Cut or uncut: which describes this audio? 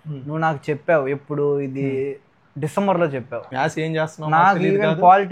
cut